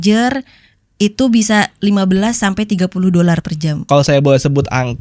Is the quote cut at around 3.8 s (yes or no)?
yes